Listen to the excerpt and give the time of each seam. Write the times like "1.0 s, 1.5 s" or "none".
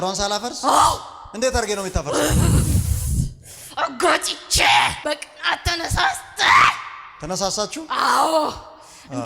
5.0 s